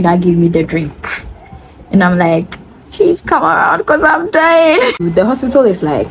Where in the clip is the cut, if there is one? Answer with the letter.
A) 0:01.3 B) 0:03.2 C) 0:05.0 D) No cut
C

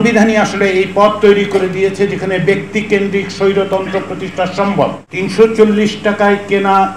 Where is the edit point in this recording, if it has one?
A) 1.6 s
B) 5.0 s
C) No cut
B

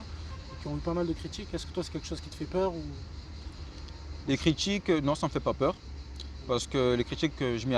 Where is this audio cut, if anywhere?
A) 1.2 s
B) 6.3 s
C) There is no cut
C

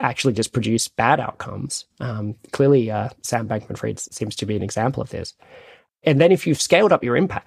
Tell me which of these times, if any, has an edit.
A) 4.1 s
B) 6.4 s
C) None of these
A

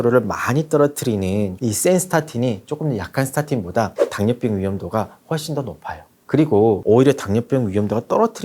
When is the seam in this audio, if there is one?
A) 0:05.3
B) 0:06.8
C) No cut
B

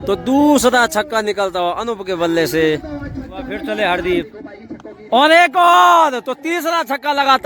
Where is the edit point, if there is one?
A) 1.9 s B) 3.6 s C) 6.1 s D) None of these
B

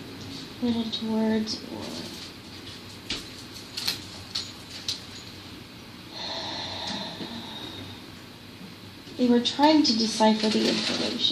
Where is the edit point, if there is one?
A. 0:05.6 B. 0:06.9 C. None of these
B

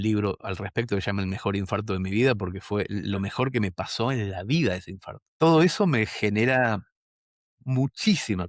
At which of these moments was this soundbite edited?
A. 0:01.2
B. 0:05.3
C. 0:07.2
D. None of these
B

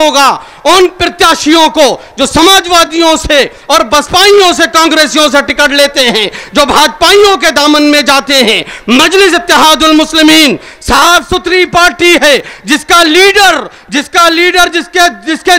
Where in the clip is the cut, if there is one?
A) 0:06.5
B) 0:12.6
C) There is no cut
C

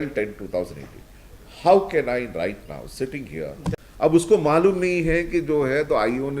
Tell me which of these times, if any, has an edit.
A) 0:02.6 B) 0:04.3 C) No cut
B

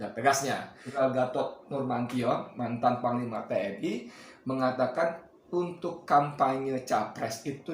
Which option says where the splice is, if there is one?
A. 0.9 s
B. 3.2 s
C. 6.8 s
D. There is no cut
A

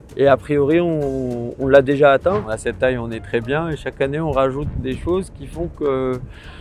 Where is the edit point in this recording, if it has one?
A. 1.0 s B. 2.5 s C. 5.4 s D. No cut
B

